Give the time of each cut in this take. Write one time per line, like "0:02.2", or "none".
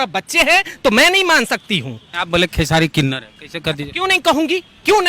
0:02.1